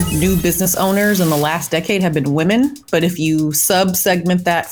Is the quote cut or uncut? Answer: uncut